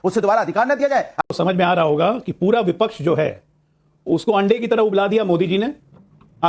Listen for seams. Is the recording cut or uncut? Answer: cut